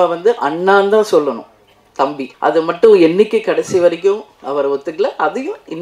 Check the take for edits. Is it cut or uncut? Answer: cut